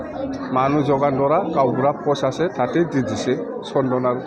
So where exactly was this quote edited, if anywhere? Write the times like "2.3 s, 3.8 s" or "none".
none